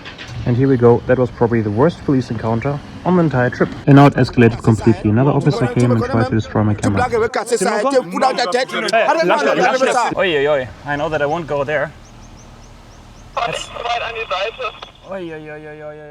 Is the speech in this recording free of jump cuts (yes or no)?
no